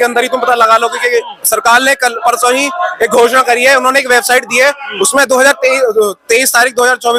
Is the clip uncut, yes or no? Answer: yes